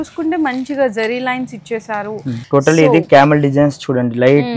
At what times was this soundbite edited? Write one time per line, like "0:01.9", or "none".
0:02.3